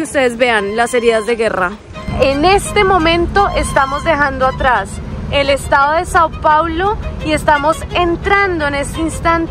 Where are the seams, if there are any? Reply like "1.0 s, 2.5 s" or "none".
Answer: 2.0 s